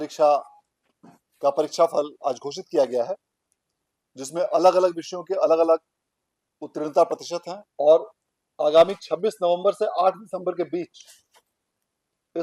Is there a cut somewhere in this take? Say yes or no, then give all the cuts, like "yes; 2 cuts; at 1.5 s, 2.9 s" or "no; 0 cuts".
yes; 1 cut; at 7.6 s